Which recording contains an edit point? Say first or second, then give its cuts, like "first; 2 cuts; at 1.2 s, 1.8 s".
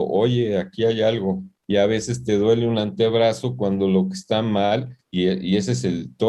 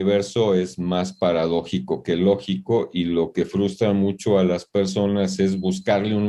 first; 1 cut; at 1.5 s